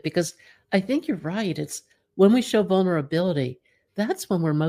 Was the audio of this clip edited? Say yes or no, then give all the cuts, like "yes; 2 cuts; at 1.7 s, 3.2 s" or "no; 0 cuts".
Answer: no; 0 cuts